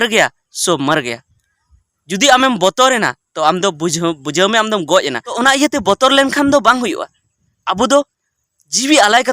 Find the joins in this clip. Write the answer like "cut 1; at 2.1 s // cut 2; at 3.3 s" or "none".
cut 1; at 5.3 s

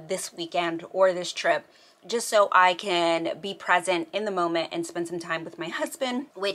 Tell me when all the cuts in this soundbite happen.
none

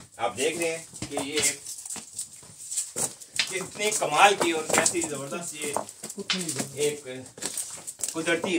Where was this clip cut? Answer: none

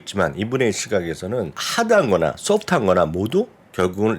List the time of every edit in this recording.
cut 1; at 1.6 s

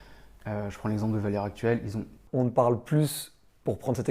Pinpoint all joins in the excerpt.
cut 1; at 2.2 s

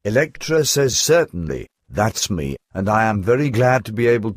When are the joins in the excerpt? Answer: cut 1; at 0.9 s

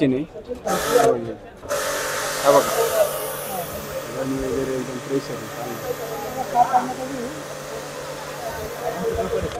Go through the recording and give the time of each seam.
none

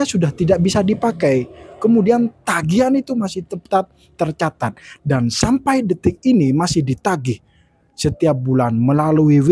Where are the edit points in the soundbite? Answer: none

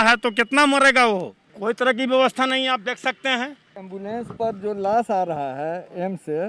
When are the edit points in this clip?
cut 1; at 1.5 s // cut 2; at 3.9 s

